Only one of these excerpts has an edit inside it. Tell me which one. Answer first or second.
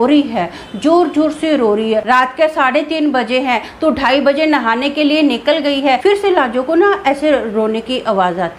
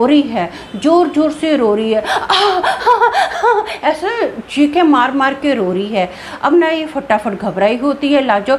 first